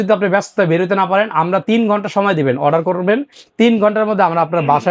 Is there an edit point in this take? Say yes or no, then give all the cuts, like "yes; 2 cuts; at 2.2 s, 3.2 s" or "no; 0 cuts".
no; 0 cuts